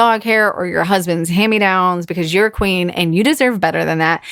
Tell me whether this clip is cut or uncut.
uncut